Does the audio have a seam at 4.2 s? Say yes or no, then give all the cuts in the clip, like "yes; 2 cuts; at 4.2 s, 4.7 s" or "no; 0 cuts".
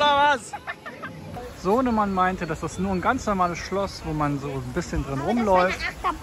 no; 1 cut; at 1.5 s